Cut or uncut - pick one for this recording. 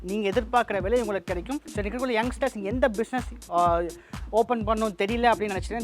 cut